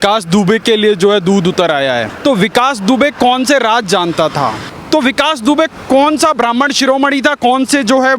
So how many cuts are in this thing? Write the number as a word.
two